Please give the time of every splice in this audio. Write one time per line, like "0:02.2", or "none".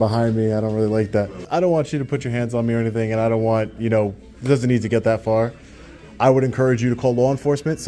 0:01.4

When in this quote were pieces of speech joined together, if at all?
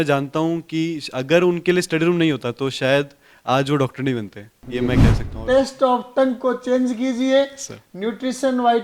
0:05.3

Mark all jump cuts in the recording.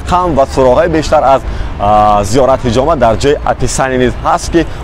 none

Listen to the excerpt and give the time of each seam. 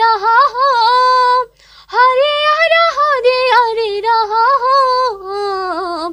none

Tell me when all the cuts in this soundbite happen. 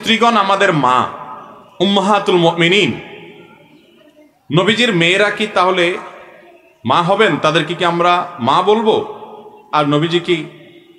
none

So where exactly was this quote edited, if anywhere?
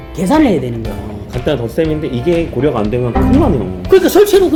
none

